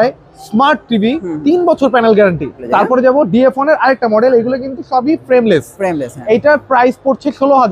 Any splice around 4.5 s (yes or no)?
no